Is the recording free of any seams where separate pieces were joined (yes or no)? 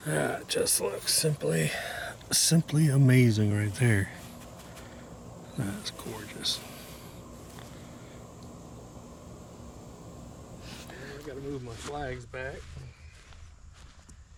yes